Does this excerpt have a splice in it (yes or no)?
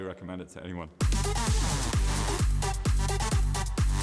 yes